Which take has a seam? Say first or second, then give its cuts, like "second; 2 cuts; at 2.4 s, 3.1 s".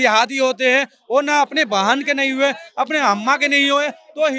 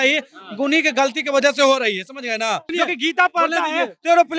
second; 1 cut; at 2.7 s